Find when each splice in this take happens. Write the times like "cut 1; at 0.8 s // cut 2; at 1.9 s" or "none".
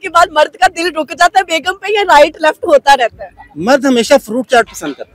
none